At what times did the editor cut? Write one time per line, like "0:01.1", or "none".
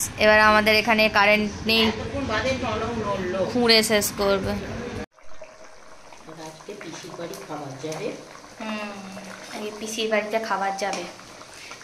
0:05.0

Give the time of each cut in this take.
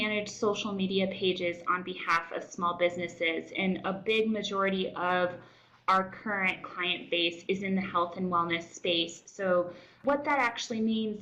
0:10.0

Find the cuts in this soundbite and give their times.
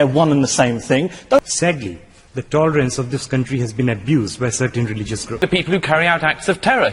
0:01.4
0:05.4

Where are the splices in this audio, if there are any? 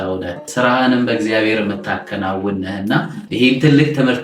none

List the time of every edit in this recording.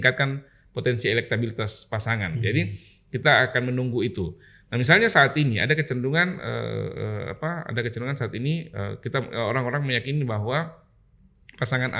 none

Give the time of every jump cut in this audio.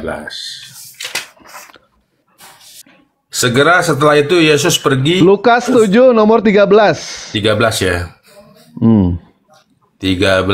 0:02.8

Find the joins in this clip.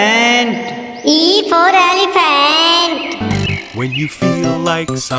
none

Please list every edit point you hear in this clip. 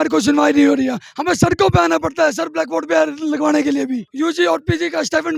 0:04.1

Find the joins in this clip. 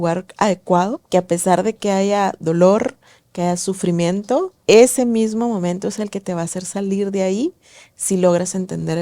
0:01.0
0:04.5

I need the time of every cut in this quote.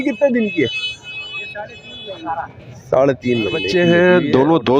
0:03.6

